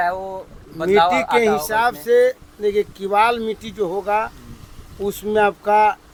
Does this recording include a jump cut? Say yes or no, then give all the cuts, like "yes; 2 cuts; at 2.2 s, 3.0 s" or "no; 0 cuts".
no; 0 cuts